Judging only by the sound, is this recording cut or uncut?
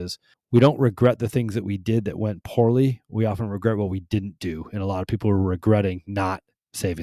uncut